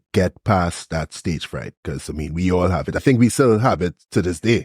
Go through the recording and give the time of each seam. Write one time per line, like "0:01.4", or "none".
0:03.0